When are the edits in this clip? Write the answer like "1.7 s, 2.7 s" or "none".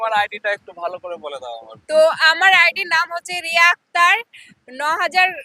none

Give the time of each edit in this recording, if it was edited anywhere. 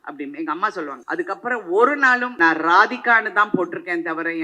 1.0 s, 2.3 s

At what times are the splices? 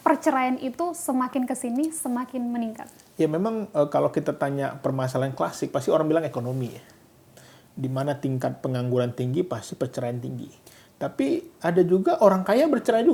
none

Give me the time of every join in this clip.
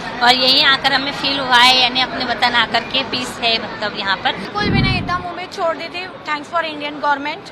4.4 s

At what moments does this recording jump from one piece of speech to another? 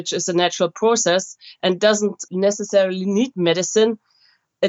2.2 s

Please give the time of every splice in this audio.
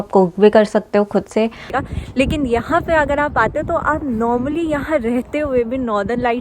1.7 s

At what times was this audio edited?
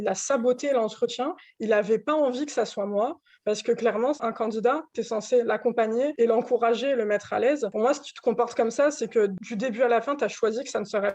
4.2 s, 6.1 s, 7.7 s, 9.4 s

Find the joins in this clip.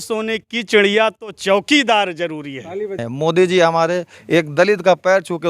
3.0 s

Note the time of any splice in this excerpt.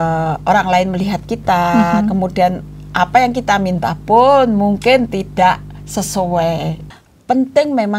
6.8 s

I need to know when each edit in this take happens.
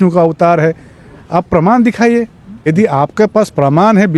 2.7 s

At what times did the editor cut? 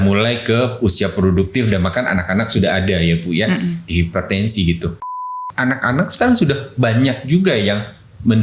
5.4 s

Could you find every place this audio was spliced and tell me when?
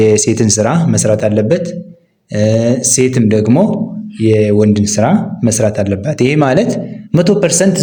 none

